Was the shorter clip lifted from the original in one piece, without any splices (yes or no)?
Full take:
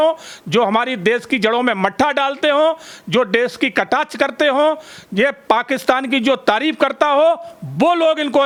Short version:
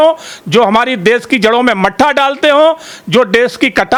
yes